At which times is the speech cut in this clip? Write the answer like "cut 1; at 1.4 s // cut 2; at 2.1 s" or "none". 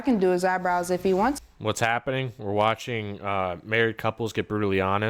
none